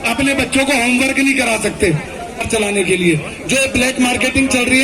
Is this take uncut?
no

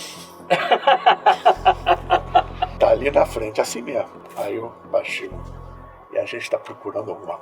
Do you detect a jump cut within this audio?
yes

